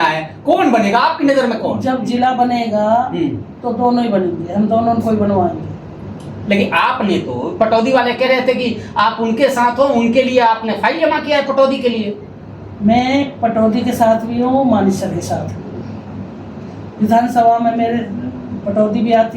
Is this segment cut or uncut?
uncut